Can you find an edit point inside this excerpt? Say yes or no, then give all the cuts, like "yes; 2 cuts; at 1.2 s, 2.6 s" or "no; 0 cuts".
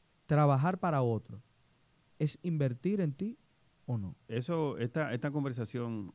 yes; 1 cut; at 4.2 s